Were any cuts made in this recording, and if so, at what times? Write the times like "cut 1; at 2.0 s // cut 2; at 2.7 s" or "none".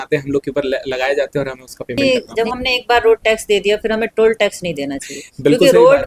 cut 1; at 2.0 s